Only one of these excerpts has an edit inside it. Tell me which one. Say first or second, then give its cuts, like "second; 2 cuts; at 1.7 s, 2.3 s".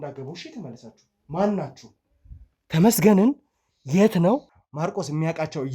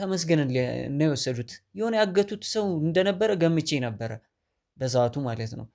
first; 1 cut; at 4.6 s